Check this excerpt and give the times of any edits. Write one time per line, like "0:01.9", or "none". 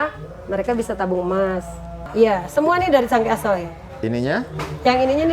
0:02.0